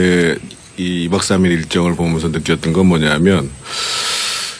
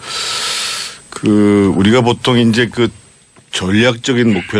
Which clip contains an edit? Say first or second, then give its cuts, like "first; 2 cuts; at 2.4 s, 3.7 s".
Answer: first; 1 cut; at 1.6 s